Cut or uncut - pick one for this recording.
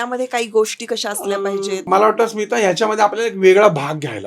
cut